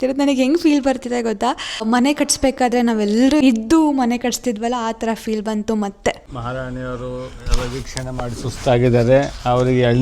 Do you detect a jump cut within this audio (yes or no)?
yes